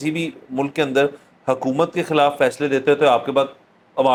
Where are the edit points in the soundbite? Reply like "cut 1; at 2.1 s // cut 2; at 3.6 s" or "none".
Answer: none